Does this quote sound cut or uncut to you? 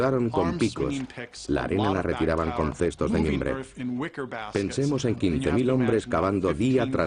cut